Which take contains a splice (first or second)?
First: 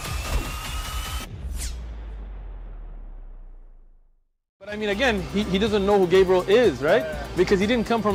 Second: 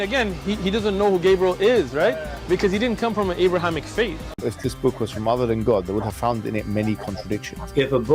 second